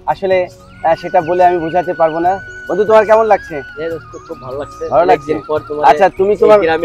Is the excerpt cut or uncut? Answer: uncut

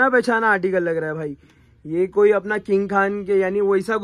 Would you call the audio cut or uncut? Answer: uncut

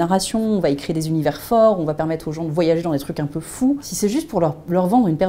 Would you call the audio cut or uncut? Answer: cut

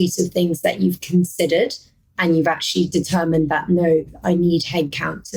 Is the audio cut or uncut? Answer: uncut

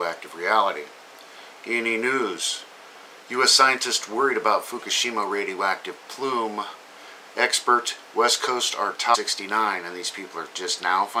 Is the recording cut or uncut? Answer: uncut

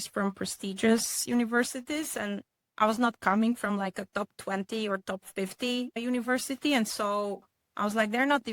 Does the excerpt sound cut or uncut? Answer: cut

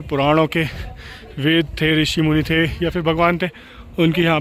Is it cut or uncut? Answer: uncut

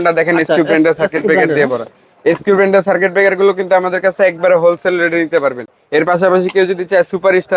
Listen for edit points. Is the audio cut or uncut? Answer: uncut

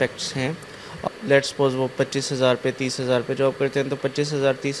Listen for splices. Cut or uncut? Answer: cut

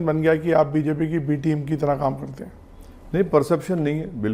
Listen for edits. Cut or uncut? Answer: uncut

